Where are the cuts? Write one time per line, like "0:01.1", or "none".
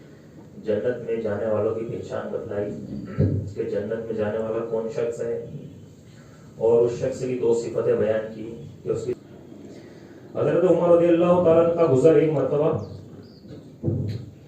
0:09.2

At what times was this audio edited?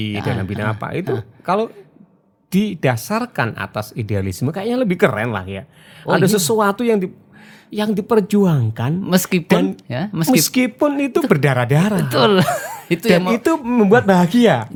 none

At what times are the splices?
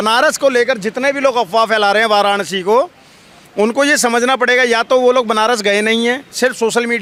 none

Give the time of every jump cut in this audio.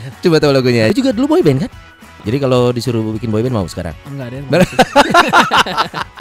0:00.9
0:02.1

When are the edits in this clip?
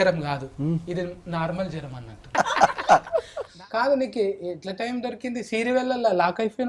0:02.3
0:03.5

